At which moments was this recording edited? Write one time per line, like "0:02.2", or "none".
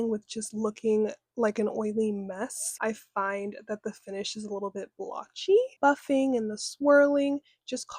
0:02.6
0:05.7